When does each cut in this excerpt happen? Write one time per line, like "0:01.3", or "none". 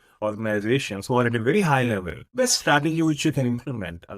0:02.2